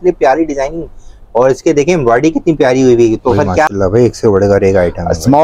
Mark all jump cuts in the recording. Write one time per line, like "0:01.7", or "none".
0:03.7